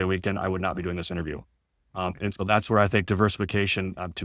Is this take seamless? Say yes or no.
yes